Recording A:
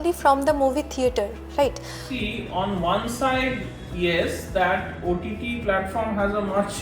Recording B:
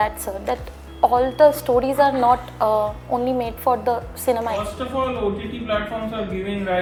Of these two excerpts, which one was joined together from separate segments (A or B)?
A